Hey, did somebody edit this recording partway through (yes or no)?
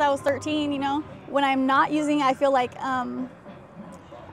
yes